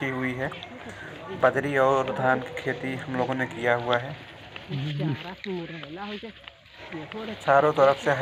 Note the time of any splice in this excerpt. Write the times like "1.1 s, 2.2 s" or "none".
none